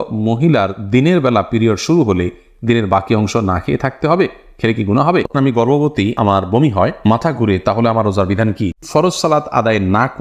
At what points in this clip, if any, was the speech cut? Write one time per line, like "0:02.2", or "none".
0:05.3
0:08.8